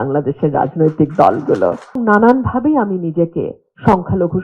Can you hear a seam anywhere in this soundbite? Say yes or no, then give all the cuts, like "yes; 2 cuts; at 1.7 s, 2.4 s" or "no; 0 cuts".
yes; 1 cut; at 2.0 s